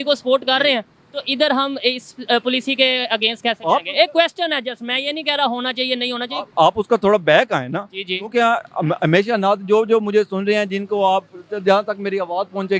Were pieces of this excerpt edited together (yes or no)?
no